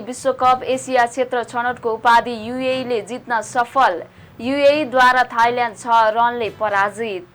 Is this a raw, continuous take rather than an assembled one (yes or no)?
yes